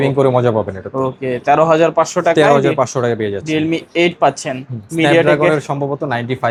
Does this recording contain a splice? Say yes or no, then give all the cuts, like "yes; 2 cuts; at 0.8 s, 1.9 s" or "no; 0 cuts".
no; 0 cuts